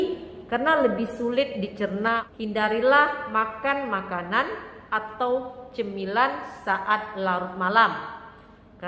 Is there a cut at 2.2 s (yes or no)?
yes